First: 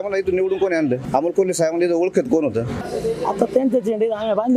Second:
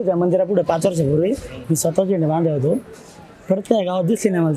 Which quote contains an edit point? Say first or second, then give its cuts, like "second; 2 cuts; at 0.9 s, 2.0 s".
first; 2 cuts; at 1.0 s, 2.8 s